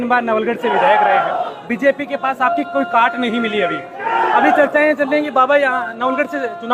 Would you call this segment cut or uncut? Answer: uncut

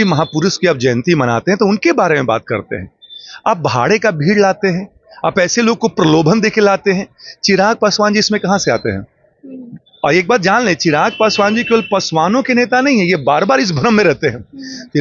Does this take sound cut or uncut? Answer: uncut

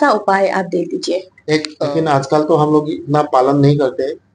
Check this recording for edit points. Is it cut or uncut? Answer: cut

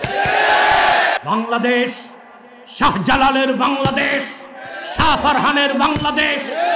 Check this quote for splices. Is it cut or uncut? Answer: cut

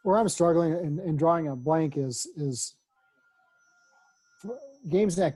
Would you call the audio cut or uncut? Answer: uncut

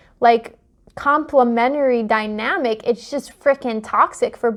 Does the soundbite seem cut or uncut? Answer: uncut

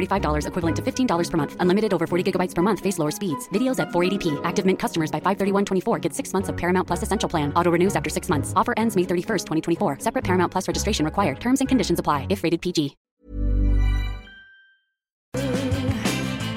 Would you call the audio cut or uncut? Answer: cut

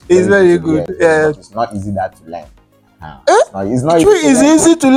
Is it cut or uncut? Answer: uncut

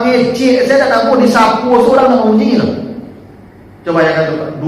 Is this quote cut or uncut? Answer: uncut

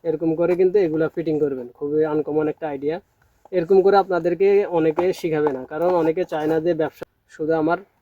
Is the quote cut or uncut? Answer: cut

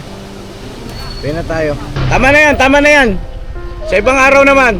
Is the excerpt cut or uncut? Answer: cut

